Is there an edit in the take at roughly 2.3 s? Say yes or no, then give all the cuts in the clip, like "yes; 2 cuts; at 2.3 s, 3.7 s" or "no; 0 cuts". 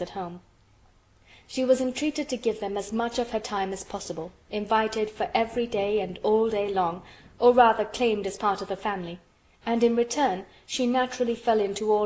yes; 1 cut; at 2.3 s